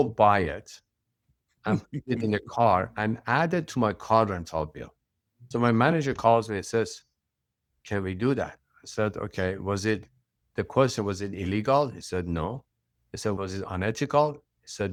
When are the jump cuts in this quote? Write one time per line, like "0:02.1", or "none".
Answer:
none